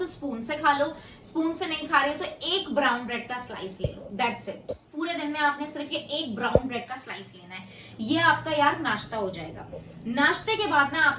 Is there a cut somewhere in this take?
no; 0 cuts

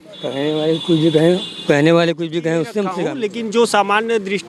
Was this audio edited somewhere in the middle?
yes; 1 cut; at 3.1 s

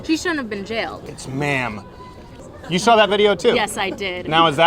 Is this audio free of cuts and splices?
no; 2 cuts; at 1.0 s, 2.4 s

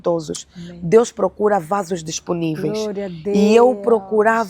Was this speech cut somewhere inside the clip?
no; 0 cuts

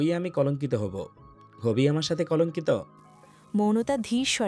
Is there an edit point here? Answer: no; 0 cuts

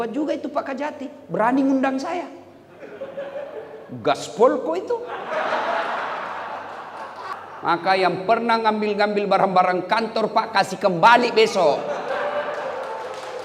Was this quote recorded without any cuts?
no; 1 cut; at 7.3 s

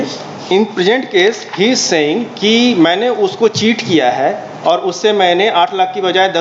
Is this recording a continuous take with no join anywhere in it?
yes; 0 cuts

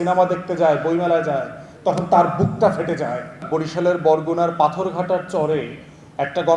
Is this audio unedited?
no; 1 cut; at 3.4 s

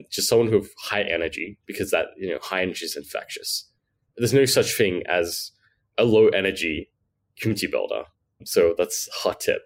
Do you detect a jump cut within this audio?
no; 0 cuts

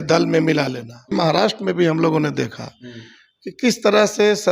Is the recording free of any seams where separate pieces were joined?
no; 1 cut; at 1.1 s

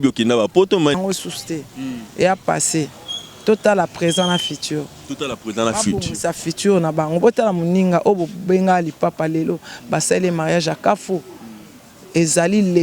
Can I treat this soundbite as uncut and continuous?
no; 1 cut; at 0.9 s

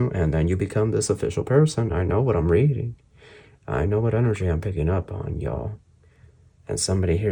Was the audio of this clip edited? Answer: no; 0 cuts

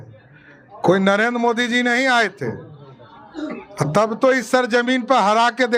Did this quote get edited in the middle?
no; 0 cuts

